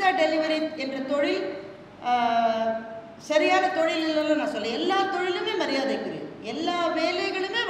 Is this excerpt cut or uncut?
uncut